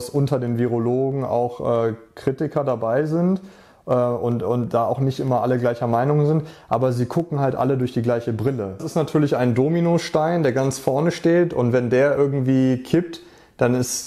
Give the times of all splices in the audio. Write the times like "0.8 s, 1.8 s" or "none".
8.8 s

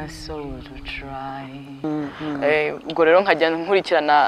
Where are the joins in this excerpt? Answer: 1.8 s

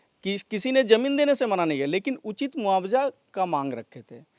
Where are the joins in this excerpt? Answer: none

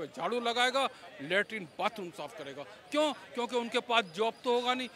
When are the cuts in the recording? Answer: none

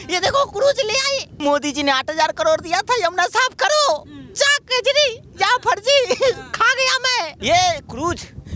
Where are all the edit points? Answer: 1.3 s, 7.3 s

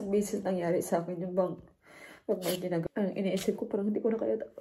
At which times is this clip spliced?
2.8 s

